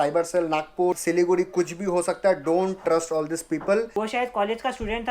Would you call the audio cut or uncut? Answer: cut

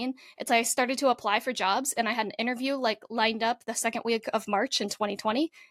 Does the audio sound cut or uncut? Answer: uncut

